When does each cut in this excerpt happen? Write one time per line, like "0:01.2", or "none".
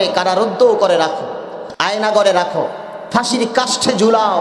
0:01.6